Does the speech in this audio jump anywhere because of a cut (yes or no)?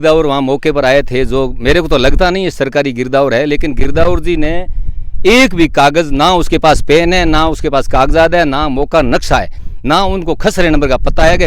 no